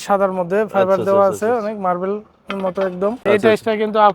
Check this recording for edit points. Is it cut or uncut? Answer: cut